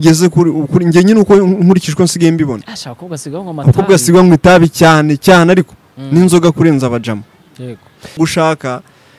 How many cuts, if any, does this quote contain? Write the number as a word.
one